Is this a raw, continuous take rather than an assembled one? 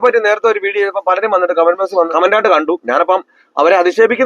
no; 1 cut; at 2.1 s

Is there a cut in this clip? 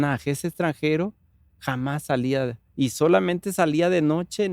no; 0 cuts

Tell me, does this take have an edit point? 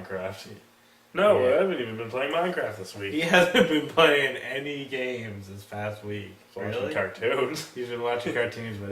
yes; 1 cut; at 3.5 s

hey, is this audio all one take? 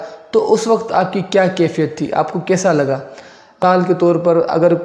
no; 1 cut; at 3.6 s

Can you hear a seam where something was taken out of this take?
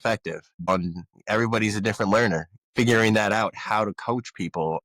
yes; 2 cuts; at 0.8 s, 2.6 s

